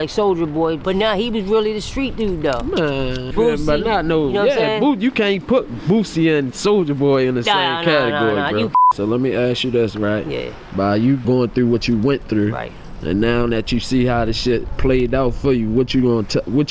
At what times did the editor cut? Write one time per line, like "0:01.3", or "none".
0:00.8
0:03.3
0:08.8
0:11.2